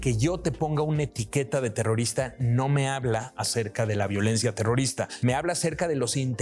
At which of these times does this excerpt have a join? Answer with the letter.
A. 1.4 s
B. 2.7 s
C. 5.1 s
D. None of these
C